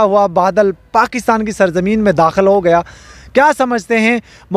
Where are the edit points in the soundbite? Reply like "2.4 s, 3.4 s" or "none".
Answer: none